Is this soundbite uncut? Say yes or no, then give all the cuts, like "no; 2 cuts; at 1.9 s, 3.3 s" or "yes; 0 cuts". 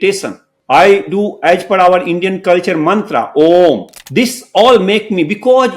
no; 1 cut; at 4.0 s